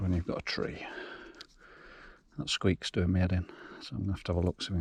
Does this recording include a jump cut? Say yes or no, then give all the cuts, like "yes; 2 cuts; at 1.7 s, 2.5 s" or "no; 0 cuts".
no; 0 cuts